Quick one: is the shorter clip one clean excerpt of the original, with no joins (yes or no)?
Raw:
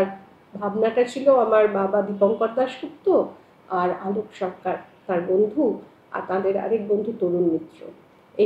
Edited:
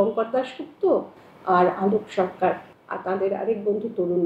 no